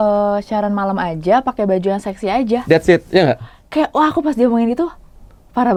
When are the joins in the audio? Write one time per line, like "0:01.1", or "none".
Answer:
none